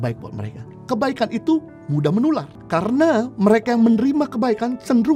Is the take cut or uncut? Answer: uncut